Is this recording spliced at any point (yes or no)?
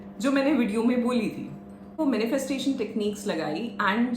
yes